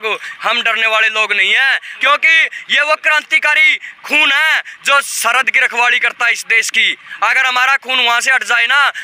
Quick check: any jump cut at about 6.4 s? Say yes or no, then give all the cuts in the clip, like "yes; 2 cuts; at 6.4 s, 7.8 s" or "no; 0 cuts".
no; 1 cut; at 1.8 s